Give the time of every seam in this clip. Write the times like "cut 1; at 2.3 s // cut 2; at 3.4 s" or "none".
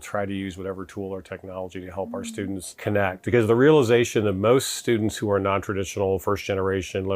cut 1; at 2.7 s